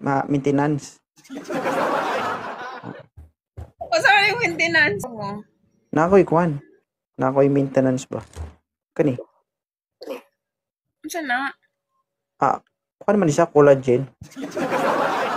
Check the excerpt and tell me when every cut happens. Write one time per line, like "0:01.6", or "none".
0:05.1